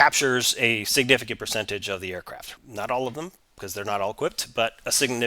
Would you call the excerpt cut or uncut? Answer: cut